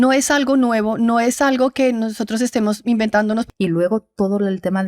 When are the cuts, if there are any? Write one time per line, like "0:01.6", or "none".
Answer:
0:03.5